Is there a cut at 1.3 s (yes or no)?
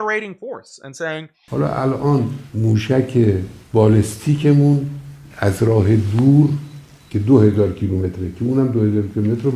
yes